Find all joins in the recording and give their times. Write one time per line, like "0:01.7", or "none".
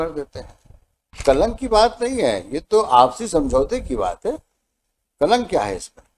0:01.2